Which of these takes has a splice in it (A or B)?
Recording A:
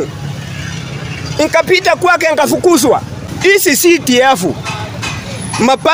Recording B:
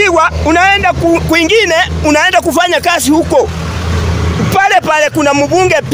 A